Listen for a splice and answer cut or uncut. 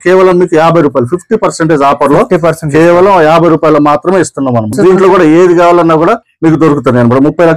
uncut